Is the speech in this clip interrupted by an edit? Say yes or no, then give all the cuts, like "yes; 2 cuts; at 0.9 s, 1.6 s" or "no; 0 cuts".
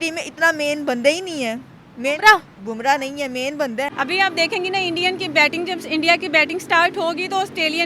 yes; 1 cut; at 3.9 s